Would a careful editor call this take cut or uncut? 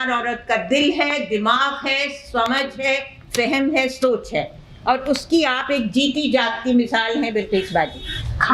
uncut